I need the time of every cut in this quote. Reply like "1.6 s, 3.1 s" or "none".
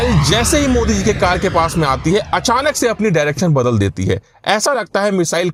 none

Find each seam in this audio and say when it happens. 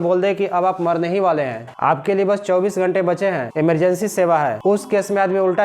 1.6 s, 3.5 s, 4.6 s

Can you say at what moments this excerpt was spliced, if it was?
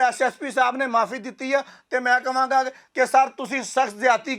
none

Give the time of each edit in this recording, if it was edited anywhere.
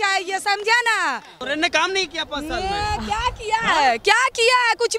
1.3 s

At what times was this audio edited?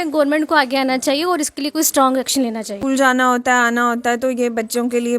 2.8 s

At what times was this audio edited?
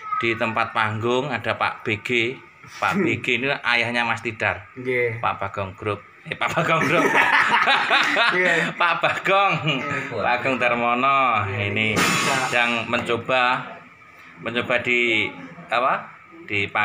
none

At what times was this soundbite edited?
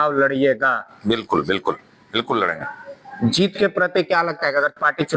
none

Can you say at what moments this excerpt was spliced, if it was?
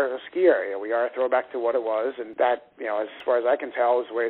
2.3 s, 3.1 s

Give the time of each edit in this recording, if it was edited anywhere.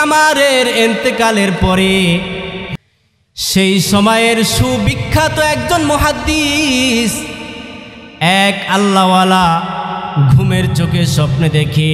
2.7 s

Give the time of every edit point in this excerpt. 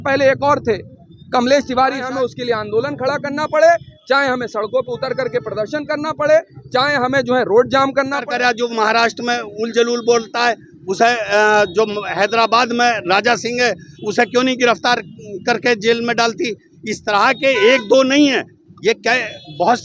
2.1 s, 8.2 s

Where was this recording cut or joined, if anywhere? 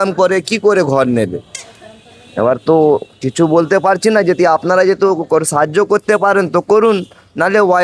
none

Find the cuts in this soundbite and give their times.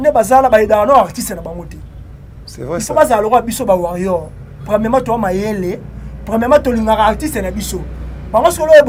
none

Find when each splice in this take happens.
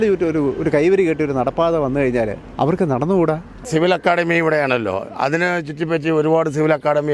3.7 s

